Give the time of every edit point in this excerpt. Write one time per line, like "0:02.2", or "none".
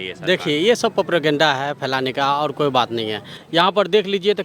0:03.4